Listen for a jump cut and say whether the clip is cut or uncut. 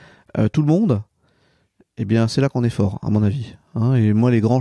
uncut